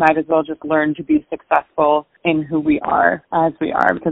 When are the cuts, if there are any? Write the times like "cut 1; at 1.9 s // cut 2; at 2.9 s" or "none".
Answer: cut 1; at 2.1 s // cut 2; at 3.2 s